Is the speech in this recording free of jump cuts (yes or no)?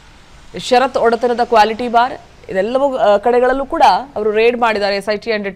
yes